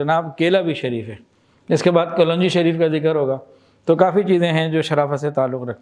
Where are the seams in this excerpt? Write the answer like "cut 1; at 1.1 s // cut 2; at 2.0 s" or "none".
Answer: none